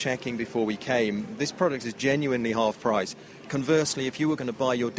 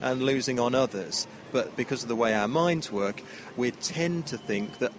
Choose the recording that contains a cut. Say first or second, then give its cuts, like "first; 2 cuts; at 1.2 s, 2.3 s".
second; 2 cuts; at 1.7 s, 3.4 s